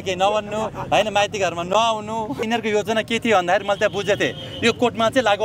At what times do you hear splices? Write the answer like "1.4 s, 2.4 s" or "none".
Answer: 2.4 s

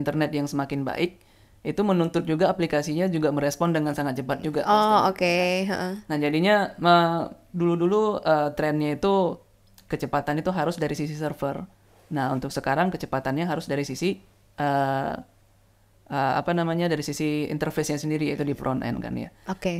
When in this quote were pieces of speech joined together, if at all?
none

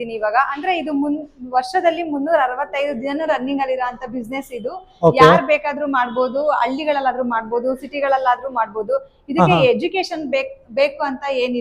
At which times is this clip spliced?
none

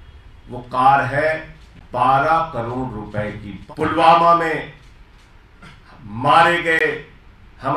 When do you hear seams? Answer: 3.5 s

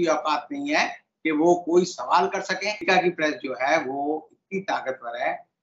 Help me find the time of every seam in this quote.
2.8 s

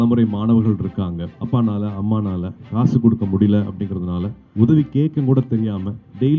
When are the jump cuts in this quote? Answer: 1.3 s, 4.4 s

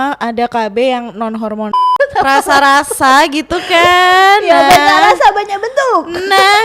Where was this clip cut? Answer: 1.8 s

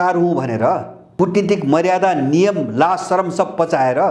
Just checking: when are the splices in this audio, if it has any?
1.1 s

